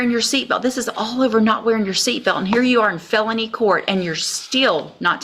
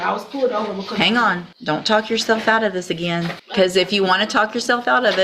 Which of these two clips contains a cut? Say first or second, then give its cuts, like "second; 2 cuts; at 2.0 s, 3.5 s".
second; 2 cuts; at 1.5 s, 3.4 s